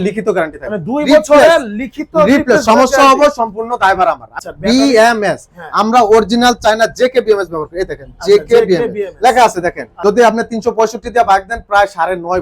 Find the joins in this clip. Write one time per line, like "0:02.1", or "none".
0:04.3
0:09.9